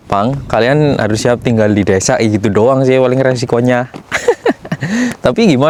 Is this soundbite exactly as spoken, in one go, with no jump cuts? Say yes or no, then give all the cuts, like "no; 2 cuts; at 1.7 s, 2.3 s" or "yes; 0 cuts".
yes; 0 cuts